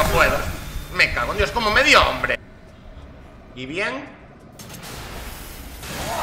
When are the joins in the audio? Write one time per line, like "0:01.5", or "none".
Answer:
0:02.4